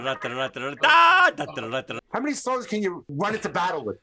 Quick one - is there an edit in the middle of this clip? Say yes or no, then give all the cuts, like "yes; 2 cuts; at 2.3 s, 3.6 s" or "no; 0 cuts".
yes; 2 cuts; at 2.0 s, 3.1 s